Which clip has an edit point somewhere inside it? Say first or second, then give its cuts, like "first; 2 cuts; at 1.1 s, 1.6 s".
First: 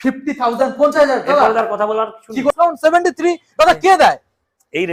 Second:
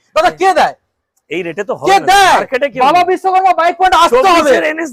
first; 1 cut; at 2.5 s